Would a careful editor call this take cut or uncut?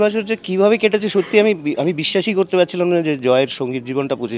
uncut